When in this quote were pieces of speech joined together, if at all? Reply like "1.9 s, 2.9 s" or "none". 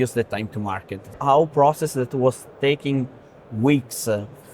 1.1 s

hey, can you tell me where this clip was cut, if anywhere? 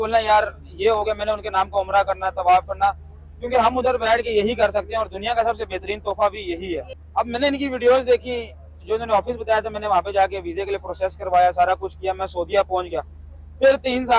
7.0 s

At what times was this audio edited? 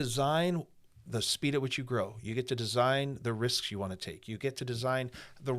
1.1 s

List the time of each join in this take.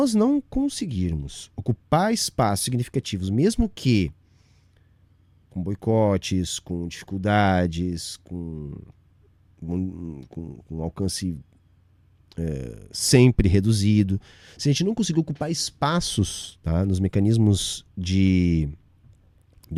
none

